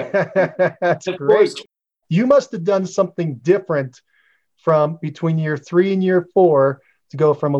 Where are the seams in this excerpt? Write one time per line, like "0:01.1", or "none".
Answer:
0:01.9